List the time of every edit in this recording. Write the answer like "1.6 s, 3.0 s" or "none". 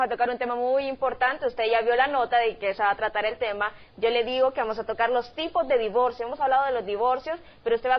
none